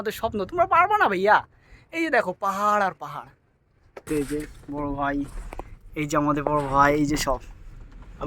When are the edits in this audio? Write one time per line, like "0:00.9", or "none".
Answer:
0:04.1